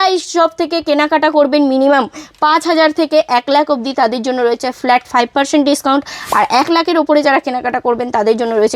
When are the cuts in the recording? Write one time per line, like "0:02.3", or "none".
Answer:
none